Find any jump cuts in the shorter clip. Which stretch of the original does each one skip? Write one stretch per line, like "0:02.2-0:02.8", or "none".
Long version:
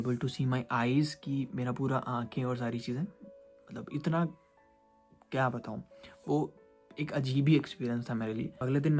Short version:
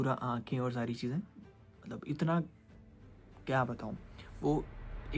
none